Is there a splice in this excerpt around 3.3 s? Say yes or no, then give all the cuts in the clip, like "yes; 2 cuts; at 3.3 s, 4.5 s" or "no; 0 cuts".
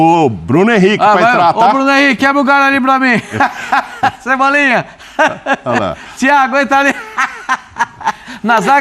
no; 0 cuts